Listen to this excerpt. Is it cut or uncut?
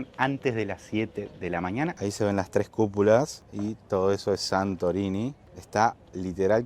cut